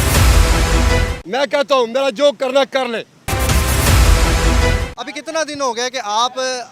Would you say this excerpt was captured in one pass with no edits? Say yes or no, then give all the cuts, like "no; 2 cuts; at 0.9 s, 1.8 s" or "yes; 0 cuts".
no; 3 cuts; at 1.2 s, 3.3 s, 4.9 s